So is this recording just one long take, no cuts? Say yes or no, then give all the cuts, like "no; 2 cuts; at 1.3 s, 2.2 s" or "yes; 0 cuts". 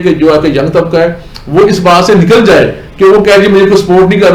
yes; 0 cuts